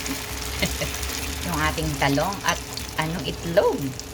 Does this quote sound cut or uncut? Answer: cut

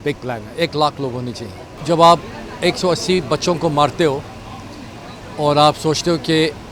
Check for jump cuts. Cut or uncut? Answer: cut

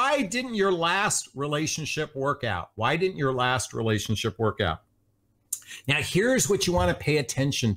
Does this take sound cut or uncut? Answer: uncut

